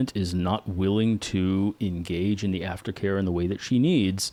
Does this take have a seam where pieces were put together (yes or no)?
no